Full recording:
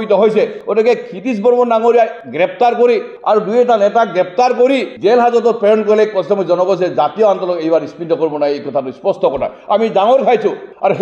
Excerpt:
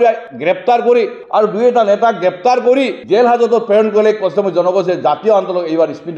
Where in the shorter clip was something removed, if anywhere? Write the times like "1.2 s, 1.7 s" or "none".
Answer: none

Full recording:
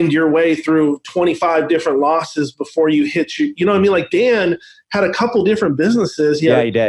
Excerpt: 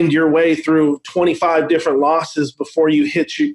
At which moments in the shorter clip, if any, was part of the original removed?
none

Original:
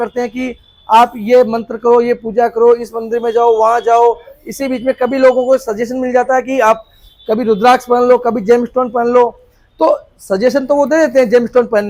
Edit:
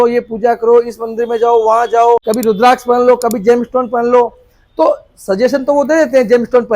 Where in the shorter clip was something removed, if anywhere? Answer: 2.3 s

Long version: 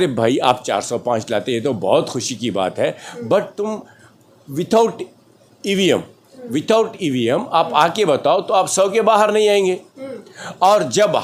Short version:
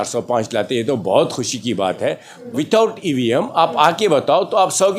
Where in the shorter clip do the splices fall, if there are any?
2.3 s

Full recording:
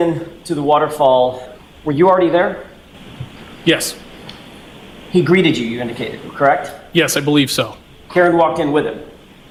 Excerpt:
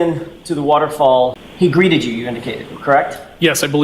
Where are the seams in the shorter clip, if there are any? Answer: 1.4 s

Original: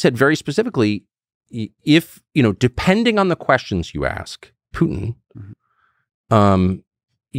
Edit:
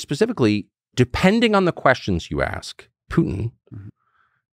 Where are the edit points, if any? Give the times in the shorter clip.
0.9 s

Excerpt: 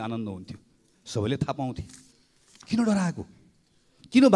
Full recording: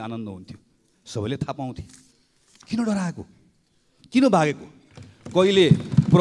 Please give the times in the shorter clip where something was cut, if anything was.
none

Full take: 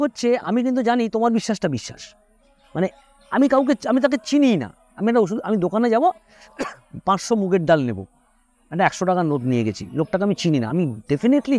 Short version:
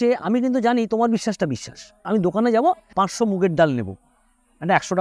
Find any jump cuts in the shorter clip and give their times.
2.0 s, 2.9 s

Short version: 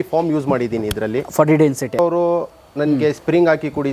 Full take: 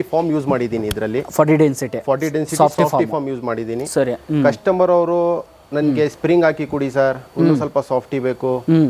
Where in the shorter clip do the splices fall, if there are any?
2.0 s

